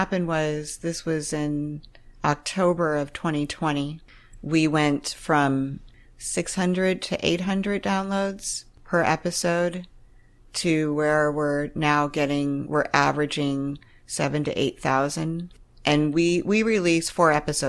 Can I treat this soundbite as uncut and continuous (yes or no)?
no